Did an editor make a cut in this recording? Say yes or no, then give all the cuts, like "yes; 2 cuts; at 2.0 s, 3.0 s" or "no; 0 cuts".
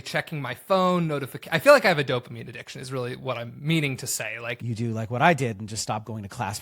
yes; 1 cut; at 4.6 s